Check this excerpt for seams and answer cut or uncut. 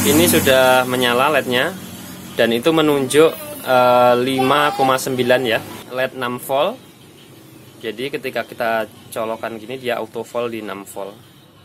cut